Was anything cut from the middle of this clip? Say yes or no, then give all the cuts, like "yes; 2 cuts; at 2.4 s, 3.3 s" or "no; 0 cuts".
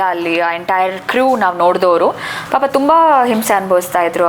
no; 0 cuts